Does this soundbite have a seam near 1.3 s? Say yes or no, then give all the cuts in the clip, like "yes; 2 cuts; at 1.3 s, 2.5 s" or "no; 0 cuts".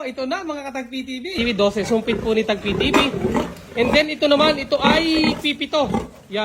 yes; 1 cut; at 1.3 s